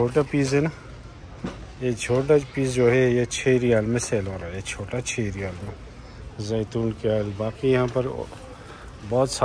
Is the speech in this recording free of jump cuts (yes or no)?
yes